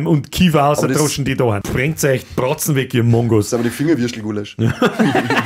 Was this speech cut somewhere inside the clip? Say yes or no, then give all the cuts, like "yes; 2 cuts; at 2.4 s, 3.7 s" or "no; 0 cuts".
yes; 1 cut; at 1.6 s